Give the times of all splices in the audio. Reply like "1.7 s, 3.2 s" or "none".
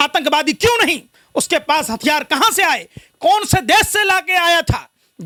none